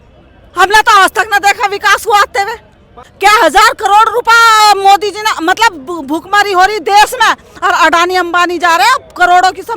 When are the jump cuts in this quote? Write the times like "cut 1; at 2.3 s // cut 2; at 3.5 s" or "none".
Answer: cut 1; at 3.0 s